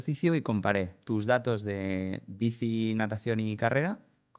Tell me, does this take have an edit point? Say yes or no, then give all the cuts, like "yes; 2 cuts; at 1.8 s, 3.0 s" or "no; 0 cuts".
yes; 1 cut; at 1.0 s